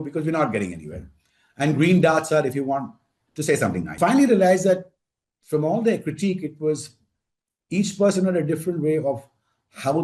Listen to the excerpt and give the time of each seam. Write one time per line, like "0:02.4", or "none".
0:03.9